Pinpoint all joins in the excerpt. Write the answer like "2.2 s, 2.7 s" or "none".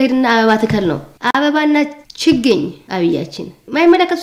none